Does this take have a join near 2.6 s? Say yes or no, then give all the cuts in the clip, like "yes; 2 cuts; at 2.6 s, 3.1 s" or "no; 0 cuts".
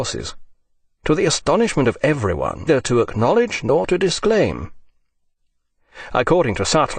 no; 0 cuts